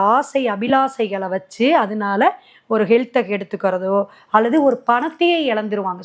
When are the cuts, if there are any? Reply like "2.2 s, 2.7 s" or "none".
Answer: none